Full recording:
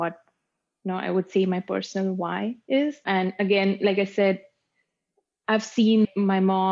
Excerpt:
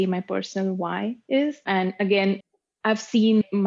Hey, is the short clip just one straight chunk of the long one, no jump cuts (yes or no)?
no